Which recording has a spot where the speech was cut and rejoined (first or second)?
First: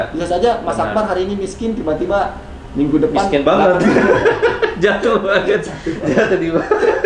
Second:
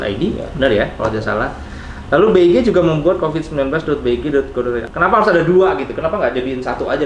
second